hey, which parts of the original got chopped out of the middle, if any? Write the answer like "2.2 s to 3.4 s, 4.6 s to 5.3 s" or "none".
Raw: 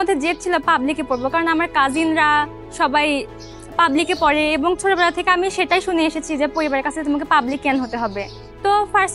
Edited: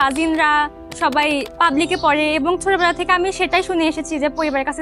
3.3 s to 3.7 s